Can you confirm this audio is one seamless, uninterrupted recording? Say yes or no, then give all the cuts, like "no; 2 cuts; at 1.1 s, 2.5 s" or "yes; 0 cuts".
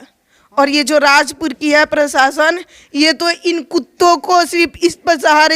yes; 0 cuts